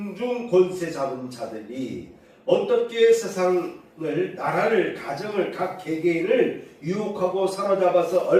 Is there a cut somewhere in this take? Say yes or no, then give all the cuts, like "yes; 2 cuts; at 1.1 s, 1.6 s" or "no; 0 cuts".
no; 0 cuts